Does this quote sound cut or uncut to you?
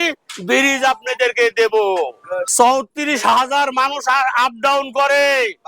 cut